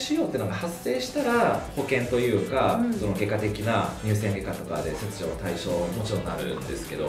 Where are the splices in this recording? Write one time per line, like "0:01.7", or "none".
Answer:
none